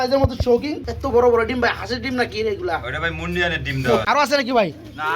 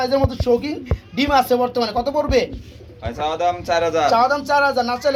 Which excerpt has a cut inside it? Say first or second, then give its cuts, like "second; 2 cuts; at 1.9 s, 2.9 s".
first; 2 cuts; at 1.1 s, 4.0 s